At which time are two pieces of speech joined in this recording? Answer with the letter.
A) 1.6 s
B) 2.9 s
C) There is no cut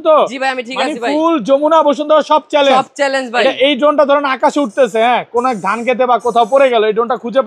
C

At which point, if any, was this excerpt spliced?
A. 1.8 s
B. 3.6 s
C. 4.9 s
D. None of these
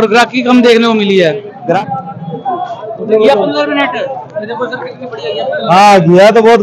A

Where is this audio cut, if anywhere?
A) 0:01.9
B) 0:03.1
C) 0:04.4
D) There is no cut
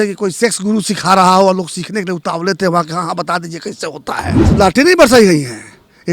C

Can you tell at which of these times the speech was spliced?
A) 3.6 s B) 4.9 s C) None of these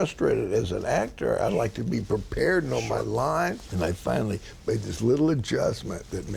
A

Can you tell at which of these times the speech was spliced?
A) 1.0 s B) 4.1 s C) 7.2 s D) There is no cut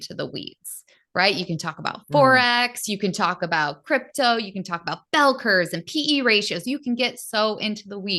D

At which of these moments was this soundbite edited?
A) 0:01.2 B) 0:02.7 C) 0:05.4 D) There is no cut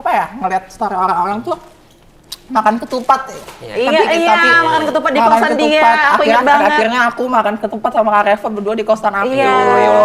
D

